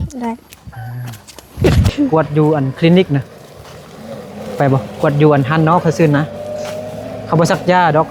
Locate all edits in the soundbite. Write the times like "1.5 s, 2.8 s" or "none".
1.6 s